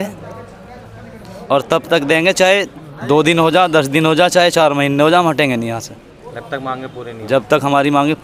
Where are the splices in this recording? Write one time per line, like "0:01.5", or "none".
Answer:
none